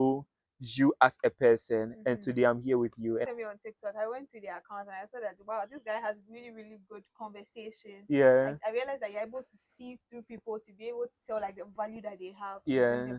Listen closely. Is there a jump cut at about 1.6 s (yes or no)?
no